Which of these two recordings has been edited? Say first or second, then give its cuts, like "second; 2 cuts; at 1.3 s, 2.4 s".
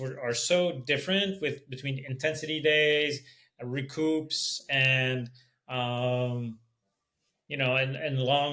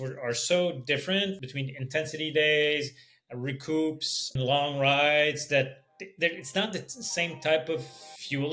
second; 2 cuts; at 1.3 s, 4.4 s